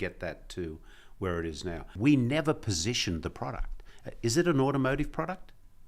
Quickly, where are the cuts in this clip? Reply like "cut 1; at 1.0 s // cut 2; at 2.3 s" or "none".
cut 1; at 1.9 s